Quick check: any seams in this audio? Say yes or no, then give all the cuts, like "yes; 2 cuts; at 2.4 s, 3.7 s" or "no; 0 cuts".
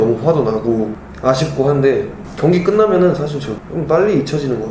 yes; 3 cuts; at 1.0 s, 2.2 s, 3.5 s